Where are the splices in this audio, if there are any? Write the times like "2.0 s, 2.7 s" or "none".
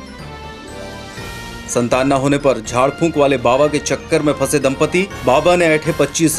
1.3 s